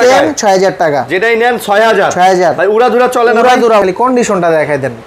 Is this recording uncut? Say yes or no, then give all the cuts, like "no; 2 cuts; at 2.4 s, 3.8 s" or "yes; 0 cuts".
no; 1 cut; at 3.8 s